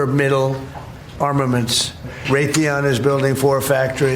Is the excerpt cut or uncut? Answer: cut